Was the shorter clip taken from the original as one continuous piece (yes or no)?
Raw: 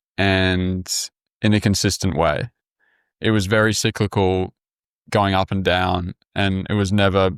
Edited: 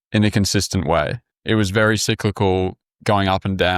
no